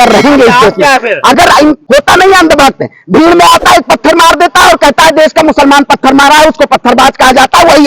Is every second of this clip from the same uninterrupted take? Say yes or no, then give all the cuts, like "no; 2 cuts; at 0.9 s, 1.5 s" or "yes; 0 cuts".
no; 1 cut; at 1.8 s